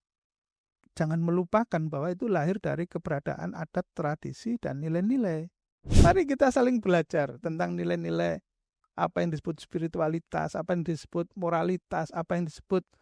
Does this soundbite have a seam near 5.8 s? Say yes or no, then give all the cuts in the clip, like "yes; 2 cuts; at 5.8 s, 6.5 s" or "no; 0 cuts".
yes; 1 cut; at 5.8 s